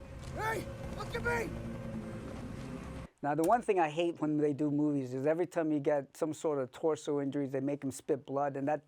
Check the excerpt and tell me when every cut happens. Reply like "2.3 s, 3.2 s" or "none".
none